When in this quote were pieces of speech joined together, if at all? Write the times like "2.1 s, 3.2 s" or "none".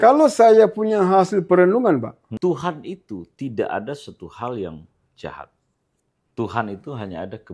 2.2 s